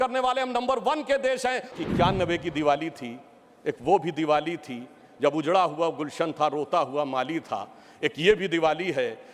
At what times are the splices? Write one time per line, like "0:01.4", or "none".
0:01.7